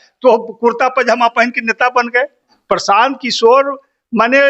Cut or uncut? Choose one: cut